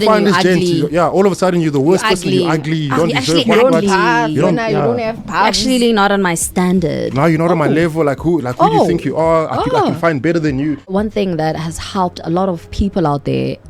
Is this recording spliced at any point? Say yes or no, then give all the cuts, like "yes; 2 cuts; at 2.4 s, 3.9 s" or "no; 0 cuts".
yes; 1 cut; at 10.9 s